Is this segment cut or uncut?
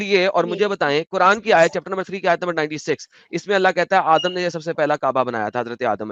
uncut